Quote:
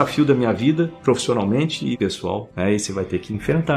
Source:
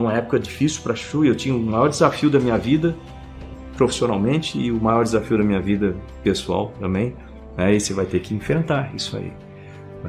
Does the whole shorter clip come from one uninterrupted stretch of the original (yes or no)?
no